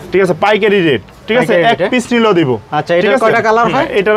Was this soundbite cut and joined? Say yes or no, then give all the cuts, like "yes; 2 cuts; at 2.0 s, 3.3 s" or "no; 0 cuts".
no; 0 cuts